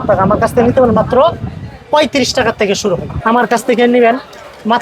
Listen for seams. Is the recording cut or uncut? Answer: cut